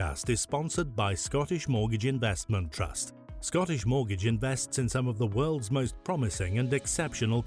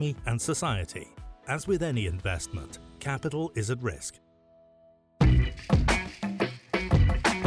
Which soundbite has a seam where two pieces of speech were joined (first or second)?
second